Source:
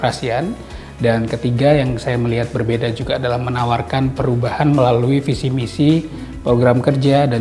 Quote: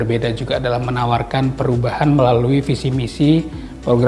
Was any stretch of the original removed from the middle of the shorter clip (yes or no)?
no